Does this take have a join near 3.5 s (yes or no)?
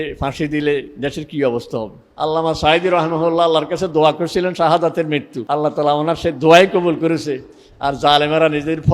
no